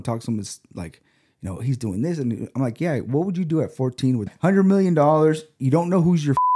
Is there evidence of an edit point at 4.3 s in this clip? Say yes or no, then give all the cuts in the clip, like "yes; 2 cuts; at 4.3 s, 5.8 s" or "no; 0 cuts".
yes; 1 cut; at 4.3 s